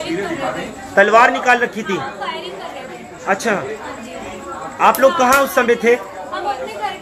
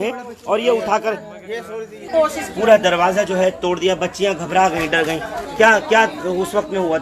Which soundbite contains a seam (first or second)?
second